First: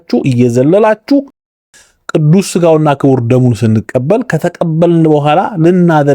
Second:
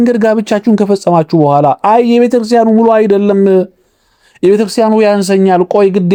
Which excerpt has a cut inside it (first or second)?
first